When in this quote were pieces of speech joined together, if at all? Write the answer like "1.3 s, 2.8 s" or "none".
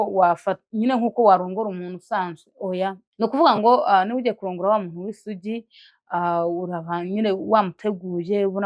3.0 s